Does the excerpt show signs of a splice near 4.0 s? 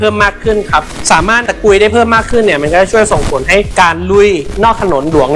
no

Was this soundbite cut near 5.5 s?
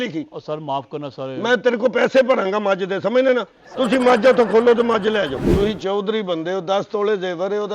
yes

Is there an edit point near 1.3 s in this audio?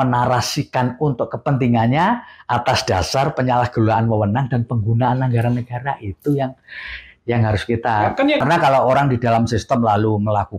no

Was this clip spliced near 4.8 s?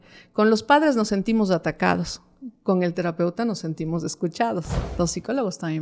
yes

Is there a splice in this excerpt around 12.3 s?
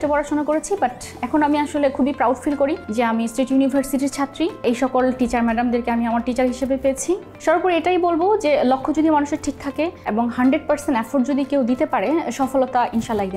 no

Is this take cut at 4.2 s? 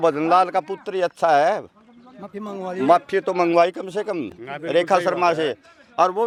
no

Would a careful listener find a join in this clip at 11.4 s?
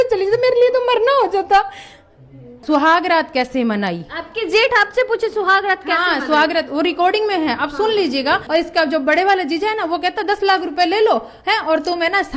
no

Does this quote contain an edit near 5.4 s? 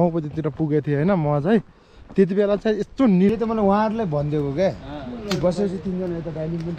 no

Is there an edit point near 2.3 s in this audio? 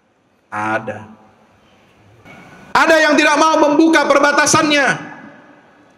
yes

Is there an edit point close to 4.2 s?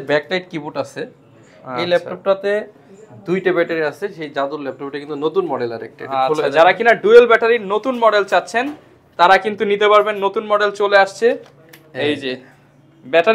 no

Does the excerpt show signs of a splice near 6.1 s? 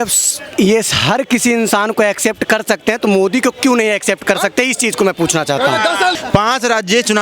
yes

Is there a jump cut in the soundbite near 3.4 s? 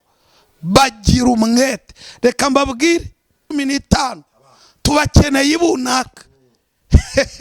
yes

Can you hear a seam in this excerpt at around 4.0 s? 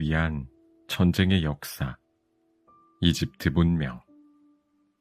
yes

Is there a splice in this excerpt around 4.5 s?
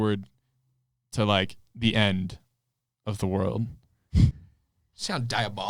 yes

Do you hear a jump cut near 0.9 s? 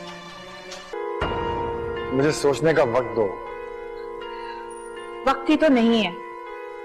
yes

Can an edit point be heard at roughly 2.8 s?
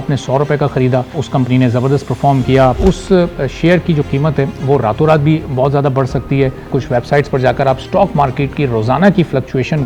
yes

